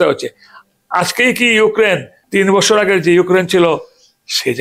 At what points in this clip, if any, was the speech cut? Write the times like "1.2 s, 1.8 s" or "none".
2.2 s